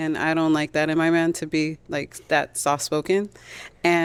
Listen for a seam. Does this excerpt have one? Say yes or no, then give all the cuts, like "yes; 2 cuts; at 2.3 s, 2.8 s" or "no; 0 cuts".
no; 0 cuts